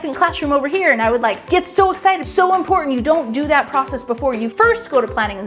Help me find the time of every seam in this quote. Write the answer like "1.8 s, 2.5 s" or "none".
1.4 s, 2.2 s, 4.5 s